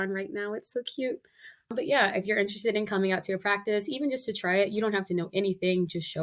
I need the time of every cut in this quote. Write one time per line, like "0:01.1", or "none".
0:01.7